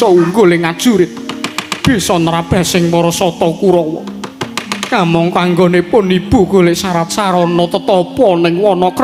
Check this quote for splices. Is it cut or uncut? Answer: uncut